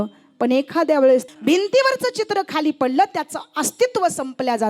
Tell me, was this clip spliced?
yes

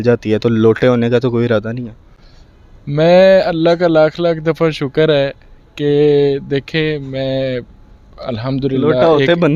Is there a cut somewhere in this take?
no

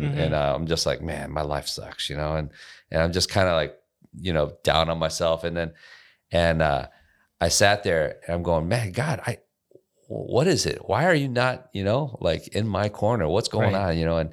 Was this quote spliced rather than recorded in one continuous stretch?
no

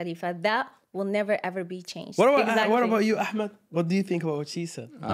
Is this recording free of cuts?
no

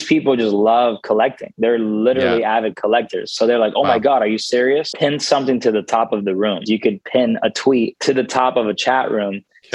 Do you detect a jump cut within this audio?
yes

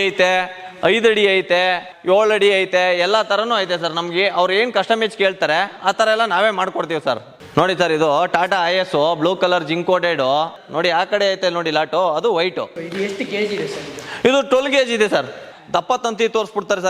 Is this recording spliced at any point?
yes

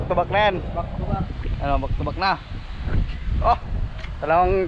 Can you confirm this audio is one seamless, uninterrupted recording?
yes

